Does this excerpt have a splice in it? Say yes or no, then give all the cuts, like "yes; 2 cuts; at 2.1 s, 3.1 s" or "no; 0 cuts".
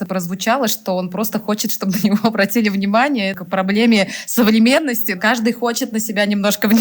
no; 0 cuts